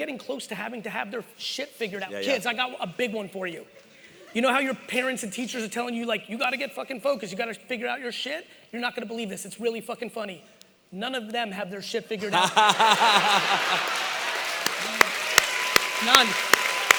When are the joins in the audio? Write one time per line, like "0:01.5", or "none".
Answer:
none